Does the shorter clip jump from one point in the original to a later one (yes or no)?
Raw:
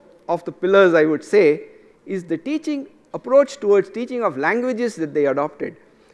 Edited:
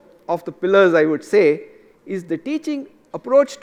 no